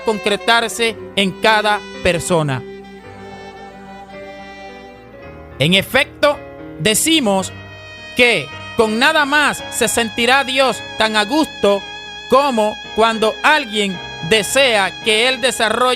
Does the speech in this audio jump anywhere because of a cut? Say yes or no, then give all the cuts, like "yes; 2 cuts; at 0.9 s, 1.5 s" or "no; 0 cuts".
yes; 1 cut; at 13.4 s